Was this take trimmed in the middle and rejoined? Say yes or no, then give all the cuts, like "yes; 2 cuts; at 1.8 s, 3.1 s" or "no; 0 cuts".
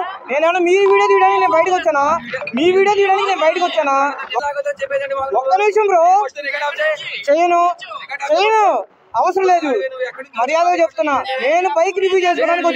yes; 1 cut; at 4.3 s